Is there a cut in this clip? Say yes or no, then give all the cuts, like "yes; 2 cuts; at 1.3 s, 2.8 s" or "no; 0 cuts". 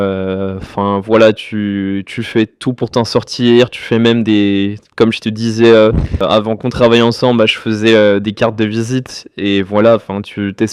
yes; 1 cut; at 6.2 s